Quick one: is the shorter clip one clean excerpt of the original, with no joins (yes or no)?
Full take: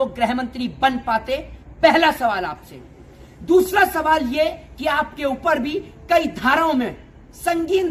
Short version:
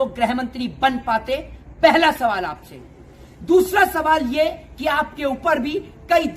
yes